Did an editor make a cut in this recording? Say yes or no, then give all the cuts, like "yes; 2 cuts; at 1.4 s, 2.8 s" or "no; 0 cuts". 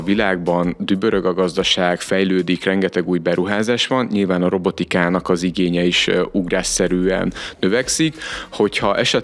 no; 0 cuts